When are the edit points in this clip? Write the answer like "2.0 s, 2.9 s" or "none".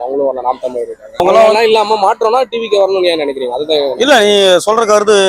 1.2 s